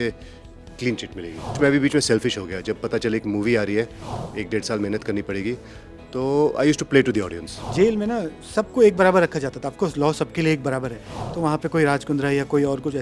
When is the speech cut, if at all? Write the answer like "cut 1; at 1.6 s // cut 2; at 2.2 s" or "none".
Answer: cut 1; at 1.6 s // cut 2; at 7.6 s